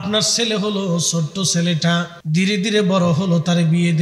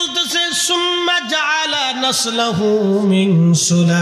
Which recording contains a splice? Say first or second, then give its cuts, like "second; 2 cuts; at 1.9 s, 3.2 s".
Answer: first; 1 cut; at 2.2 s